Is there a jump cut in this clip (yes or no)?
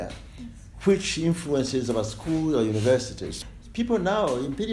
yes